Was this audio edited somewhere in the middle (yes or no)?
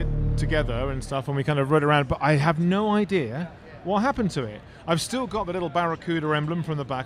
no